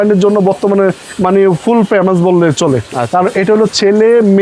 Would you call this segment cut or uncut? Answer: uncut